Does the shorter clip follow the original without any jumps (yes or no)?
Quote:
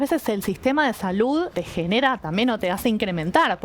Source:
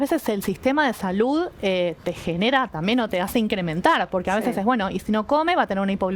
no